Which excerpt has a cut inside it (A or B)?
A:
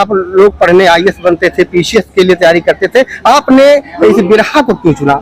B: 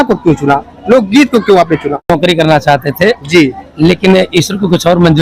B